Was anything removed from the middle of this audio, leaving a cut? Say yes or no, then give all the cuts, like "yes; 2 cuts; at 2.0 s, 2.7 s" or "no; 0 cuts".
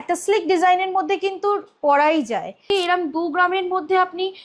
yes; 1 cut; at 2.7 s